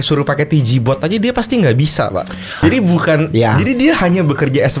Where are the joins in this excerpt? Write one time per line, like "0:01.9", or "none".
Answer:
0:02.6